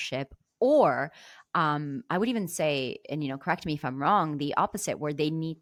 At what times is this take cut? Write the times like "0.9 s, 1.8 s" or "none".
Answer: none